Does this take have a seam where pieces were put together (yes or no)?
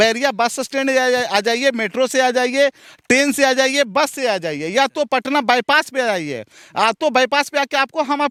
no